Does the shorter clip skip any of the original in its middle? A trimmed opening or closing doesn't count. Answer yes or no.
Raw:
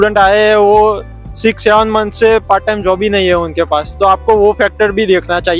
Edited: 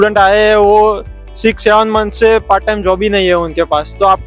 no